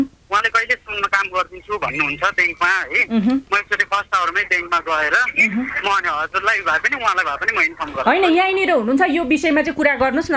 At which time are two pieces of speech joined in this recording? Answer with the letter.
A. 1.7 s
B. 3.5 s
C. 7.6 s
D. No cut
D